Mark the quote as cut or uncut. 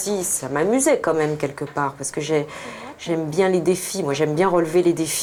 uncut